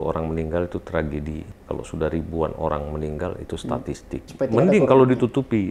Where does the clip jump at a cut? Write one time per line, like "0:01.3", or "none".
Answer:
0:01.4
0:04.2